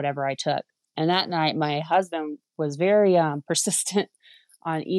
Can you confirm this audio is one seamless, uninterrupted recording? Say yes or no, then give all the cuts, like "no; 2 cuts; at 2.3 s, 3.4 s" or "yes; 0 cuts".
yes; 0 cuts